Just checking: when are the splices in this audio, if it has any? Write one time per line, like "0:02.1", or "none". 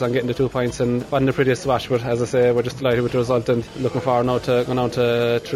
0:01.1
0:03.8